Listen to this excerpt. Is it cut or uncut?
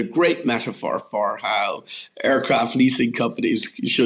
uncut